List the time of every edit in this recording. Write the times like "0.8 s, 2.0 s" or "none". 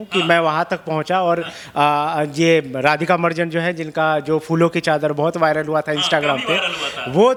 none